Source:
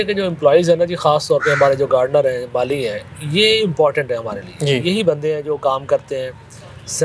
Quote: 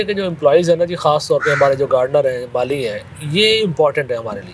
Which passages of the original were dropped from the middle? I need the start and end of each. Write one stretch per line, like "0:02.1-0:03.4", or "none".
none